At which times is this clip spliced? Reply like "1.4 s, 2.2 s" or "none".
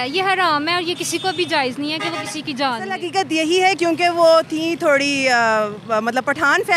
3.0 s